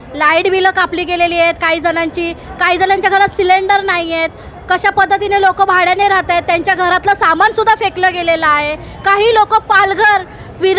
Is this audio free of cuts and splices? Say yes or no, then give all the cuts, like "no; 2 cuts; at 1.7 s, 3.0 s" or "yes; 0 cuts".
yes; 0 cuts